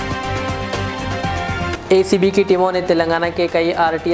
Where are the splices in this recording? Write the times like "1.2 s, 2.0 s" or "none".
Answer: 1.7 s